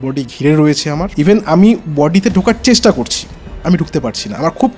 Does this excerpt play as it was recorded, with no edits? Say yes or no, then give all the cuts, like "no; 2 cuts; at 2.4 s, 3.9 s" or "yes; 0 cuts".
no; 1 cut; at 1.1 s